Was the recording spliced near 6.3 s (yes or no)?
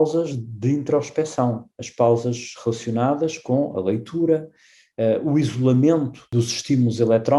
yes